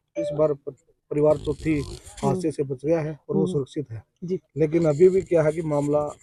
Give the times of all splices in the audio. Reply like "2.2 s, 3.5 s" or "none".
none